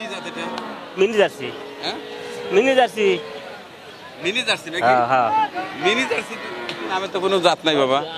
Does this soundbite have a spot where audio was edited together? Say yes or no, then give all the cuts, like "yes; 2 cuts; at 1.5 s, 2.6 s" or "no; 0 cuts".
no; 0 cuts